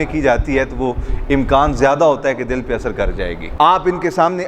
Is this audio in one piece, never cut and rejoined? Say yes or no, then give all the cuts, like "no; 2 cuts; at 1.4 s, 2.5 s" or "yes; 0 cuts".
no; 1 cut; at 3.5 s